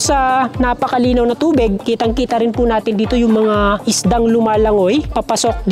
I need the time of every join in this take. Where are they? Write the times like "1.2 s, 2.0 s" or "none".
none